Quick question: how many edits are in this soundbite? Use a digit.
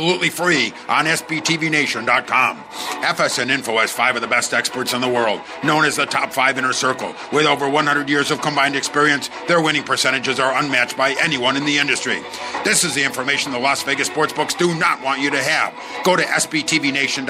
0